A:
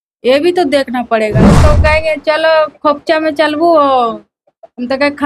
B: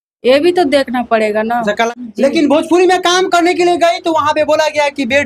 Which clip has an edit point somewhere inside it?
A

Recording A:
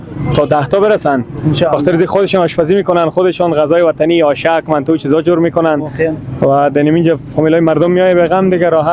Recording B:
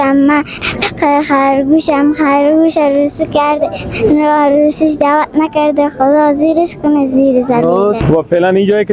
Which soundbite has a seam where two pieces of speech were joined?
B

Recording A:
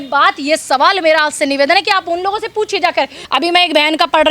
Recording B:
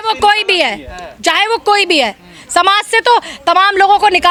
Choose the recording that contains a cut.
A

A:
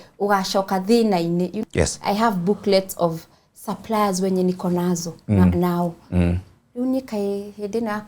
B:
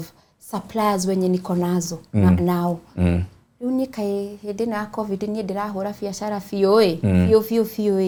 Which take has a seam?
A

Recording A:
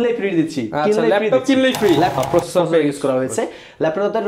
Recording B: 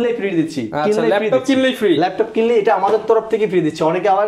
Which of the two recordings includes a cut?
A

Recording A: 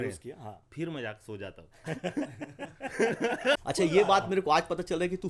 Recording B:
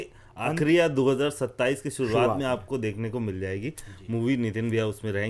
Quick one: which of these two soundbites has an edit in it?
A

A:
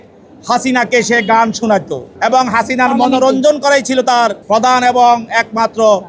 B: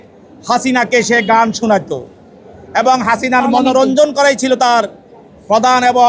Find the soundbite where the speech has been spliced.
A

